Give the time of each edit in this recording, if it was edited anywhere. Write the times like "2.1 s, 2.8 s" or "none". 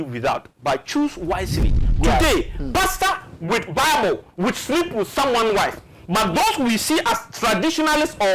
1.8 s